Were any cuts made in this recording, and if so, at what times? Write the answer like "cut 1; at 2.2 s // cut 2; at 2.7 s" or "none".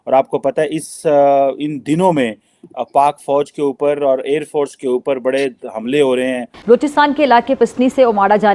cut 1; at 6.5 s